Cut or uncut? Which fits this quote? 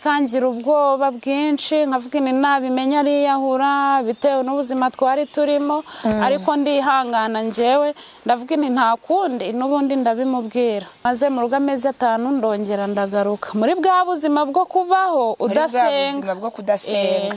cut